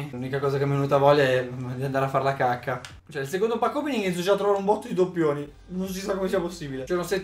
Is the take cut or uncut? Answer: uncut